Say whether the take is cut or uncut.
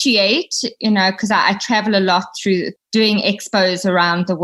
uncut